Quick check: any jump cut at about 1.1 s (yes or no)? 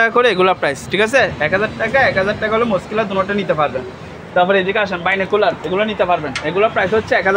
no